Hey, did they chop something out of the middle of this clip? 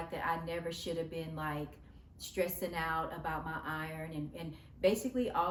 no; 0 cuts

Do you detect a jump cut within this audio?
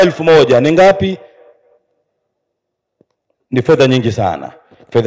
no; 0 cuts

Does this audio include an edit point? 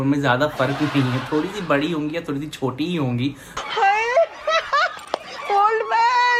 no; 0 cuts

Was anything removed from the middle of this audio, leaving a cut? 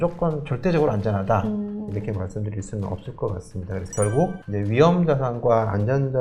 no; 0 cuts

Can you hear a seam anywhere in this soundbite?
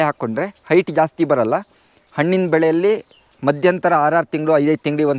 no; 0 cuts

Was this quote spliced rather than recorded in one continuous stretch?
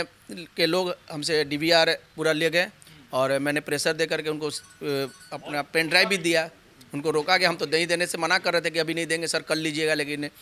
no; 0 cuts

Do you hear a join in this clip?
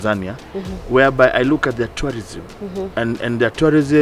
no; 0 cuts

